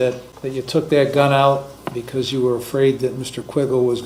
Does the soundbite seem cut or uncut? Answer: uncut